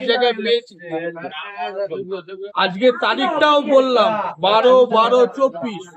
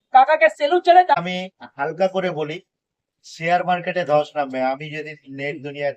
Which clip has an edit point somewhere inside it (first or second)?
second